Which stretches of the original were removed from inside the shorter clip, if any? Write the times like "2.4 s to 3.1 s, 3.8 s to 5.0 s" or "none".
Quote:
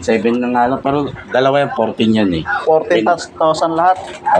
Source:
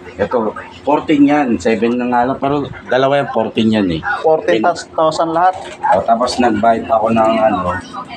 none